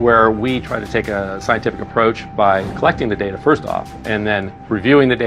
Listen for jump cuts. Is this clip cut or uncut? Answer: cut